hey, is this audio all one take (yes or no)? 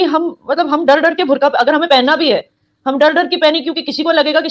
yes